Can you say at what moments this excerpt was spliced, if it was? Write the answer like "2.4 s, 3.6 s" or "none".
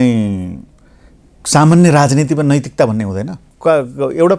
3.4 s

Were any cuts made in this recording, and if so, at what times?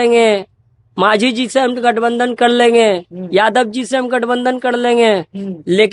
none

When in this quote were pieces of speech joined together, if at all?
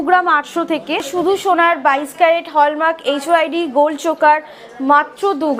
1.1 s

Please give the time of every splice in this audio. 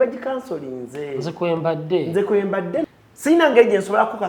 2.8 s

